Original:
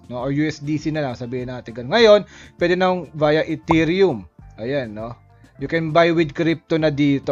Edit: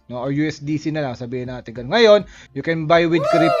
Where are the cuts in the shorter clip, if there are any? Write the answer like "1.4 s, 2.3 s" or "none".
2.4 s